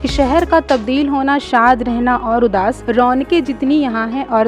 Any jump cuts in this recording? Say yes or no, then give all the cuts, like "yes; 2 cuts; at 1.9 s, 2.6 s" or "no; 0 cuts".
yes; 1 cut; at 2.8 s